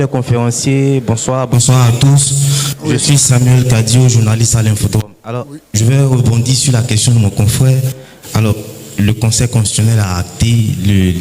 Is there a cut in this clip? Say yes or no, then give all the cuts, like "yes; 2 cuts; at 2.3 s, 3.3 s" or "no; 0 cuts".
no; 0 cuts